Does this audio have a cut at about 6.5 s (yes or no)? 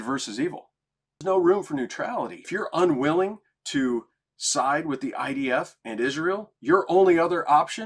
yes